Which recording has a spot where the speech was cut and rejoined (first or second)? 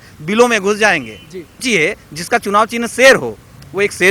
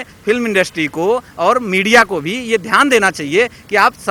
first